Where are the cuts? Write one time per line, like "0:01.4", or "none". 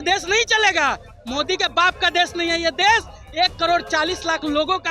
none

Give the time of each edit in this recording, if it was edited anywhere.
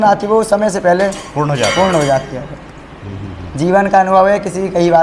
none

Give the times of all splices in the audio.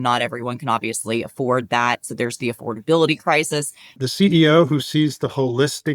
0:03.9

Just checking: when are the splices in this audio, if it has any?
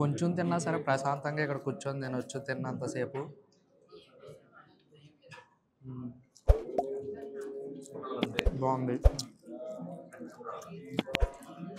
none

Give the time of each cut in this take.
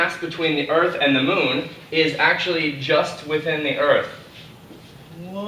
0:01.0

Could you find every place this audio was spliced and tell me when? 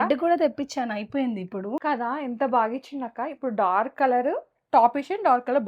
0:01.8

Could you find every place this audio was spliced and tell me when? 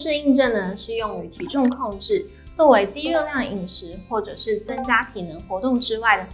none

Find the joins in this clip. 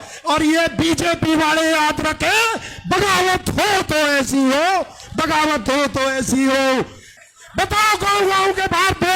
0:07.2

